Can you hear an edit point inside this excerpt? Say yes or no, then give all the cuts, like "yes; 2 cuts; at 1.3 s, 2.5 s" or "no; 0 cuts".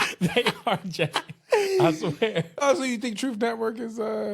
yes; 1 cut; at 2.6 s